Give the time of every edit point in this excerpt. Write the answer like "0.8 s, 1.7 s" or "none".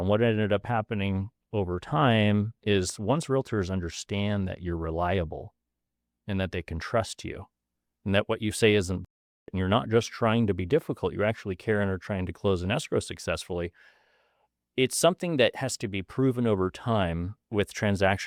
none